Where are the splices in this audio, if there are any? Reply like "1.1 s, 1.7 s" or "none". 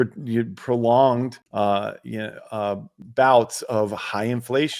1.4 s, 2.9 s